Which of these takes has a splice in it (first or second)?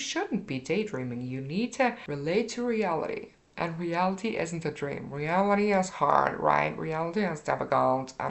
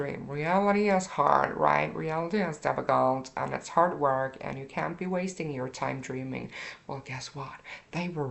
first